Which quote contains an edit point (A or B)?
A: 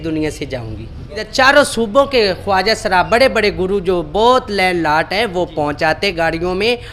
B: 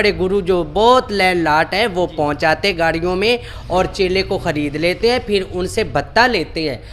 A